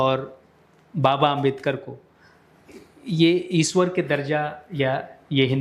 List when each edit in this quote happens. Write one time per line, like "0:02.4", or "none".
none

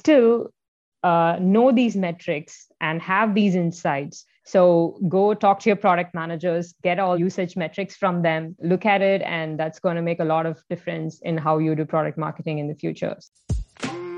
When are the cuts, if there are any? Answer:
0:13.2

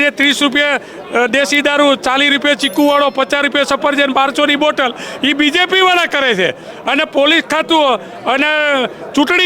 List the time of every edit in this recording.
none

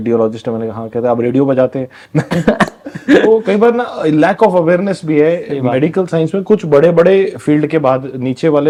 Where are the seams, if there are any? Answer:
none

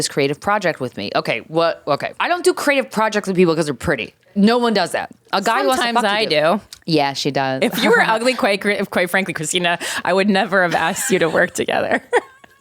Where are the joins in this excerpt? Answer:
0:02.2
0:04.3
0:06.7

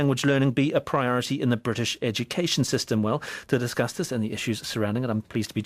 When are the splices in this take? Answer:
0:03.5

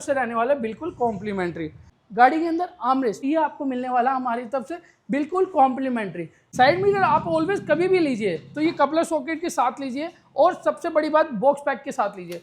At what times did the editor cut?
0:01.9
0:03.2
0:06.4

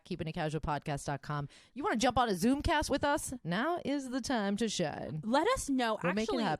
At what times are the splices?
0:01.6

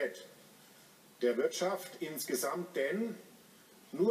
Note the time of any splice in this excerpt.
0:02.0

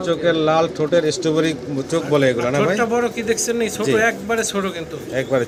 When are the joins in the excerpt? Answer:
none

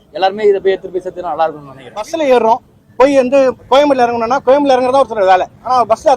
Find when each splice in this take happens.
0:02.1

